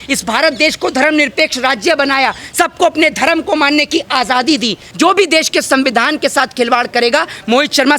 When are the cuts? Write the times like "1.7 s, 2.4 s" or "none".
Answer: 4.8 s